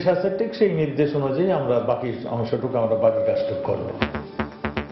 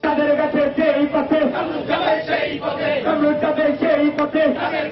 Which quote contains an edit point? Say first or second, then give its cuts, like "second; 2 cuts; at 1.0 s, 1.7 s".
first; 1 cut; at 3.9 s